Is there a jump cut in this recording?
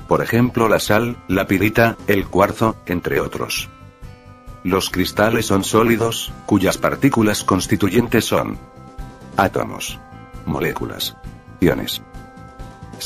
yes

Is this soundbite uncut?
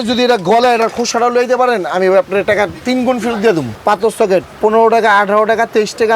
no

